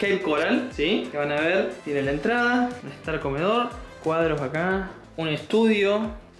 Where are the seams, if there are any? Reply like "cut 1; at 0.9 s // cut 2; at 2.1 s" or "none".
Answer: cut 1; at 2.8 s // cut 2; at 3.9 s // cut 3; at 5.0 s